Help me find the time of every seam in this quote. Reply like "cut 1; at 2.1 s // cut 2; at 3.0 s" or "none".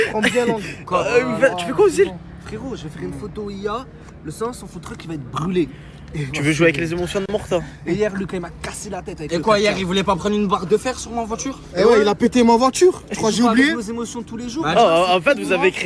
cut 1; at 7.4 s